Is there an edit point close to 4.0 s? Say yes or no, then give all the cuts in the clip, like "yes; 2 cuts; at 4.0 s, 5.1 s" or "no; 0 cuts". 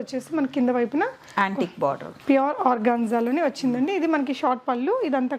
no; 1 cut; at 2.1 s